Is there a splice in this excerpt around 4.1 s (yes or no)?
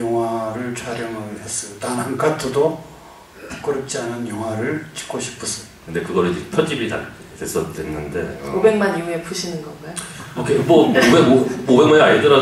no